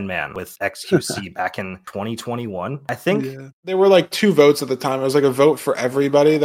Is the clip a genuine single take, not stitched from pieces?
no; 1 cut; at 3.7 s

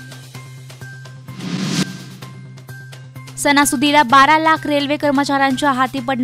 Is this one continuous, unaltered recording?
no; 1 cut; at 0.9 s

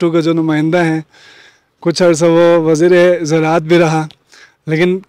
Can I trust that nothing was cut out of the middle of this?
yes; 0 cuts

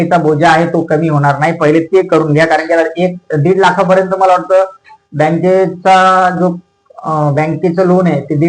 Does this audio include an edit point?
no; 0 cuts

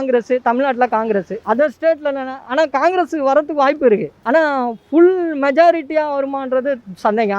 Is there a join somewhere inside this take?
yes; 2 cuts; at 1.3 s, 4.1 s

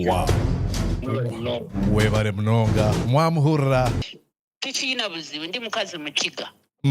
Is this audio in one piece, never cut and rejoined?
no; 1 cut; at 4.0 s

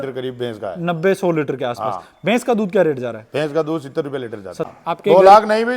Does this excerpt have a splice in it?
yes; 1 cut; at 4.7 s

